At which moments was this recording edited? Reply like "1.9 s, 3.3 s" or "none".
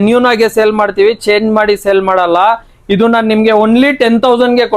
none

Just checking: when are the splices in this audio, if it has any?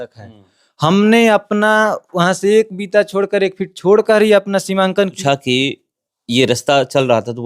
5.2 s

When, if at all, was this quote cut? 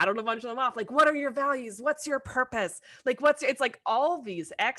none

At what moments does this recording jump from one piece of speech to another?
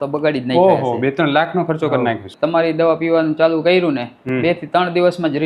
2.3 s

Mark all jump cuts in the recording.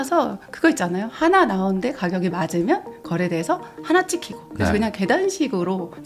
none

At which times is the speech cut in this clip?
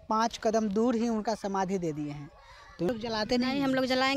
2.9 s

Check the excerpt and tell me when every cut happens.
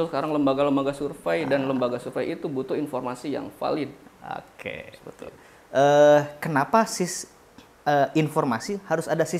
none

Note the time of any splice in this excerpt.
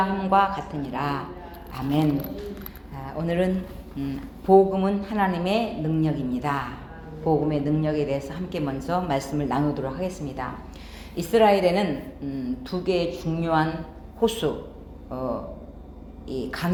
none

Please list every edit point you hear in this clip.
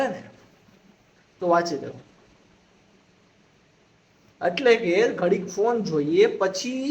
none

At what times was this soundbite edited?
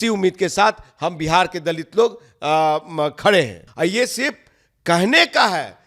3.6 s

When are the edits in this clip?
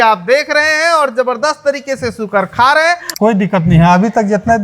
3.1 s

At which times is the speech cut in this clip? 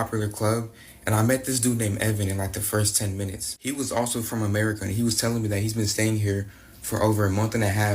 none

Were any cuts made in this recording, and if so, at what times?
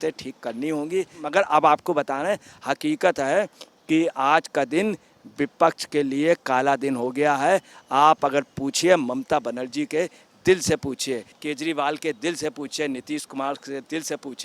1.2 s, 11.4 s

